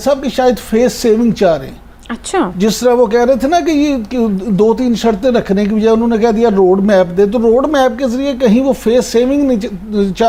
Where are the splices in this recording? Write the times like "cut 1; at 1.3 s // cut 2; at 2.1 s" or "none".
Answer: none